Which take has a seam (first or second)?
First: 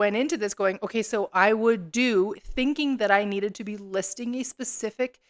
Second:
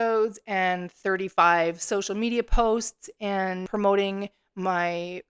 second